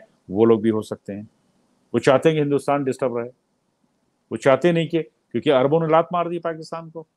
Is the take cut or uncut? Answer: uncut